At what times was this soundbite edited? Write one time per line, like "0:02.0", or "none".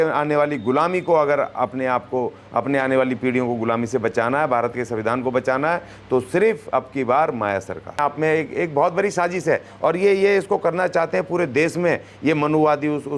0:08.0